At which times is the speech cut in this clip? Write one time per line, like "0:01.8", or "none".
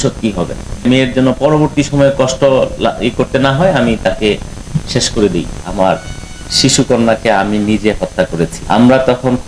0:00.8
0:05.6